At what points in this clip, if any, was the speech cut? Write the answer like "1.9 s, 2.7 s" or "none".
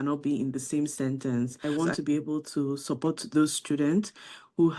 1.6 s

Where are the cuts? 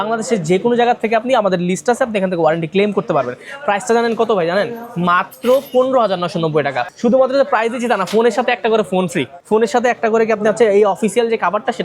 6.9 s, 9.3 s

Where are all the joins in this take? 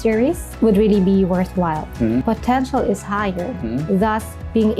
2.2 s

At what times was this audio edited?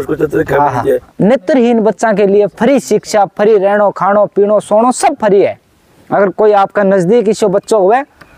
1.0 s

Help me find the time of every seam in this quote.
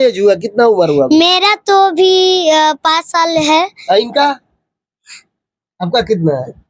none

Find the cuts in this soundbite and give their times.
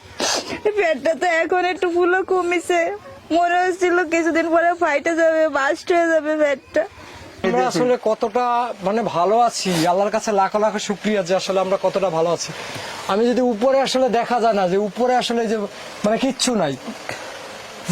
7.4 s

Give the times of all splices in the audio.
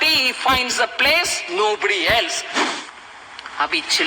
2.5 s

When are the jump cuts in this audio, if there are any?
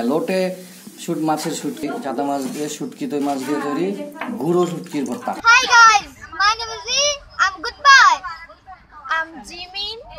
1.8 s, 5.4 s

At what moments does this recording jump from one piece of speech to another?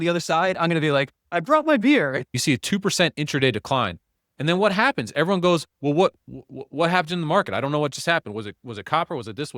2.3 s

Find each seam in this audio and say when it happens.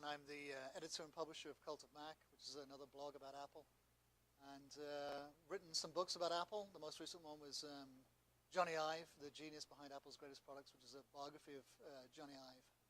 5.6 s

